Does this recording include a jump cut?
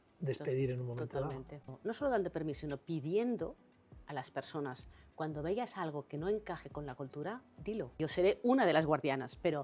yes; 2 cuts; at 1.7 s, 7.9 s

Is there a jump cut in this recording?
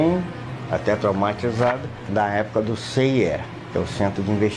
yes; 2 cuts; at 2.1 s, 3.5 s

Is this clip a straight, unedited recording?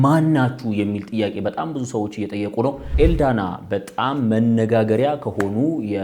no; 1 cut; at 2.9 s

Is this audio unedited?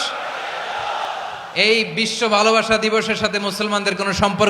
no; 1 cut; at 1.1 s

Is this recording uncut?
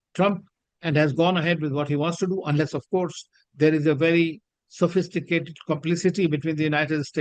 yes; 0 cuts

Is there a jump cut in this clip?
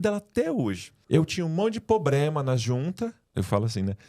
yes; 2 cuts; at 0.9 s, 3.3 s

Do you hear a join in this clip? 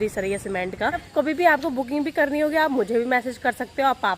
yes; 1 cut; at 1.1 s

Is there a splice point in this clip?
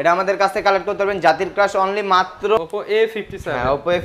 yes; 1 cut; at 2.6 s

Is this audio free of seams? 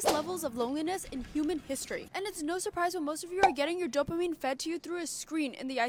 yes; 0 cuts

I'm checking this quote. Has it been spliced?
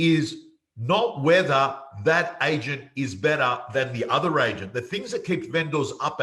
no; 0 cuts

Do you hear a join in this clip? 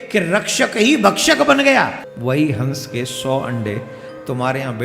yes; 1 cut; at 2.1 s

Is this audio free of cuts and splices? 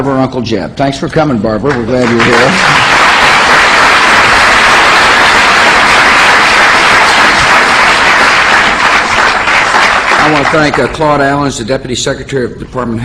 yes; 0 cuts

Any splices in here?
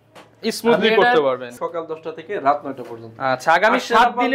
yes; 1 cut; at 1.5 s

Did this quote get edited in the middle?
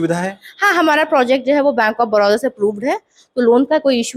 no; 0 cuts

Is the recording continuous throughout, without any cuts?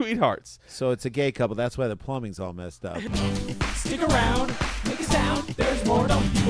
no; 1 cut; at 3.1 s

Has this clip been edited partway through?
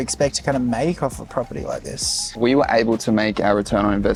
no; 0 cuts

